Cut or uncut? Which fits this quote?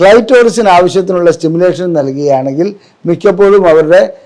uncut